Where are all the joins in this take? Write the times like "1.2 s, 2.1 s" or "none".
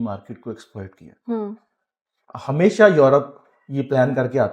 none